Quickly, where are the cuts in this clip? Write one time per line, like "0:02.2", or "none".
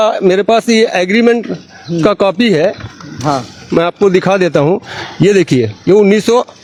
none